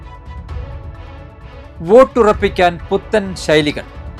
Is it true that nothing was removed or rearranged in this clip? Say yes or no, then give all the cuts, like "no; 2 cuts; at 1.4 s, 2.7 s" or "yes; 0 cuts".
yes; 0 cuts